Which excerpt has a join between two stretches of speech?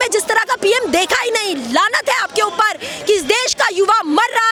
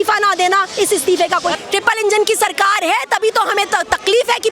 second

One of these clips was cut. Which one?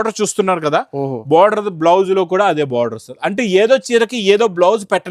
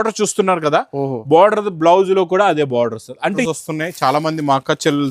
second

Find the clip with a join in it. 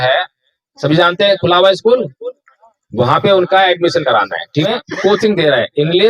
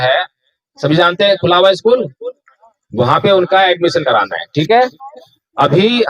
first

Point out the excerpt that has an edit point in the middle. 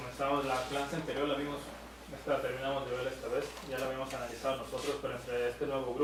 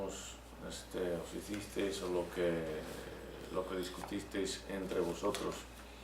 second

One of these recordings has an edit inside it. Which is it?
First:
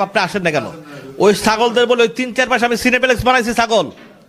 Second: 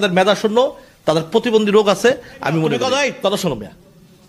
second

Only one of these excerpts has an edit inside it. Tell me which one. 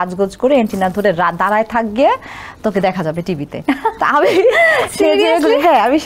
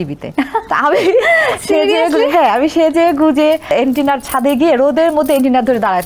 second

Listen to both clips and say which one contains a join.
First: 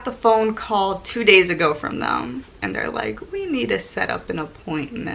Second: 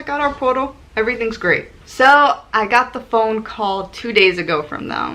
second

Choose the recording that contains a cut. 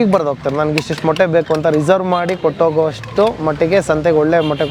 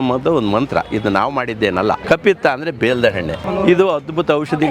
second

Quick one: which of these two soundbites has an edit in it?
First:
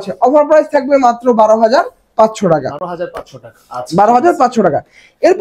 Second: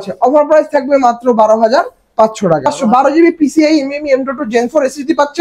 second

